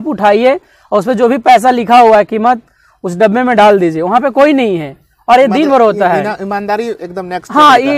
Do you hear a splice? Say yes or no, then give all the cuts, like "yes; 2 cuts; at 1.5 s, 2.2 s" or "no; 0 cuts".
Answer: no; 0 cuts